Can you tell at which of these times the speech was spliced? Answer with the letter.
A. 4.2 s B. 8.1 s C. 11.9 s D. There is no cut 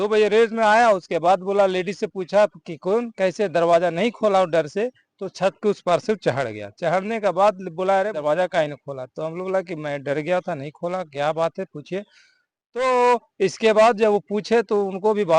B